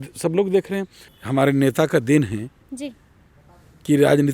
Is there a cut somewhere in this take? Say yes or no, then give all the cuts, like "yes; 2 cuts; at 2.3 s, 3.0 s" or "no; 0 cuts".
yes; 1 cut; at 1.0 s